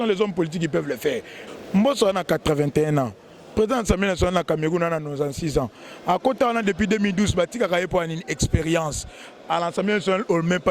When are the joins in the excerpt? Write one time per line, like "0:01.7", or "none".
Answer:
0:01.4